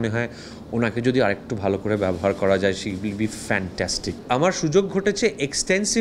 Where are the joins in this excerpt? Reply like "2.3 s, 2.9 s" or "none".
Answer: 4.1 s